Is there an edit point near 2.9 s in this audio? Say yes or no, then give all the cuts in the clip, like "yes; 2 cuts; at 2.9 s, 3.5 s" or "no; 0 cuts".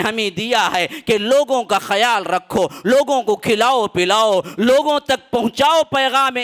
no; 0 cuts